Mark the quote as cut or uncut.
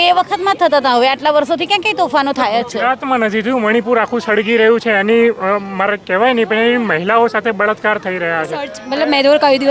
cut